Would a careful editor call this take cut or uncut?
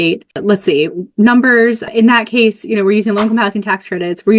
uncut